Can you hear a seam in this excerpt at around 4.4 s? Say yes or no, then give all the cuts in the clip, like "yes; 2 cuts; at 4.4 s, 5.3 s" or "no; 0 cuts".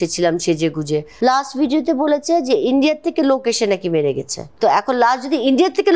yes; 2 cuts; at 1.1 s, 4.4 s